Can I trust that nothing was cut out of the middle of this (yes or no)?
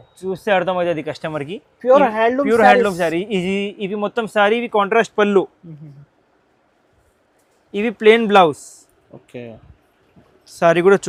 yes